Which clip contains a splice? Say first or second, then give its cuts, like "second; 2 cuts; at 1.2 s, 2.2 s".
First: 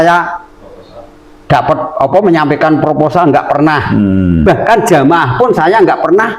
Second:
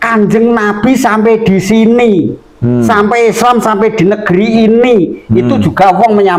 first; 1 cut; at 4.4 s